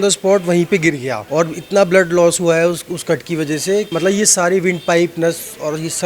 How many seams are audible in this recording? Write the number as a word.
two